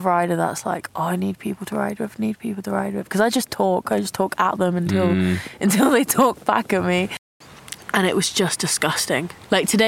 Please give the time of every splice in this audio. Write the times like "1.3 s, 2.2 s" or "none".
7.2 s